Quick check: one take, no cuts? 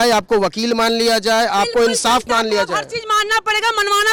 yes; 0 cuts

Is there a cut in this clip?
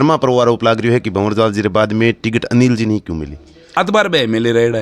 yes; 1 cut; at 3.8 s

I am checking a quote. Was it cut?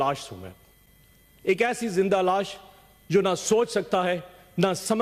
no; 0 cuts

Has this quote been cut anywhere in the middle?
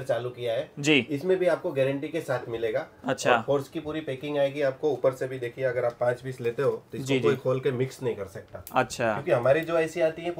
no; 0 cuts

